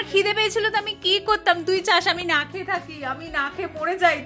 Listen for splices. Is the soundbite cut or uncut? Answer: uncut